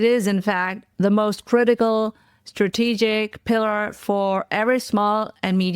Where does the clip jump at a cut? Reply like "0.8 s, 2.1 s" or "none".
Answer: none

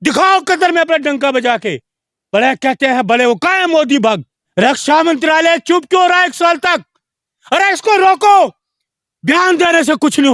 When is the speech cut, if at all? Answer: 4.3 s

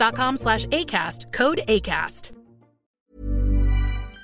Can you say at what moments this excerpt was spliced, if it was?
2.9 s

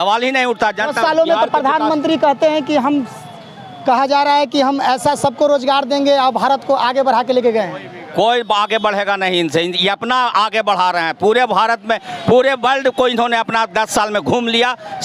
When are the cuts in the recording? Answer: none

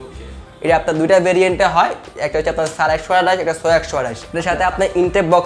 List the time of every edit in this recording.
4.2 s

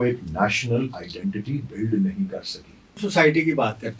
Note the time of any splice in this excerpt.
3.0 s

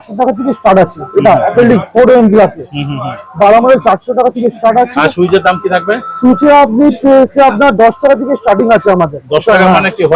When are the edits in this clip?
none

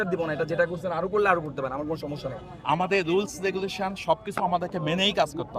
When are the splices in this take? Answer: 2.5 s

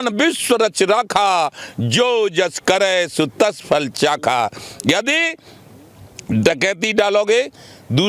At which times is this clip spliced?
none

